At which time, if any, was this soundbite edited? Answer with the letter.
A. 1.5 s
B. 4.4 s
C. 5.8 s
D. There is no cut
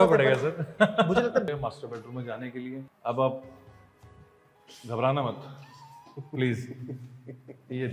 A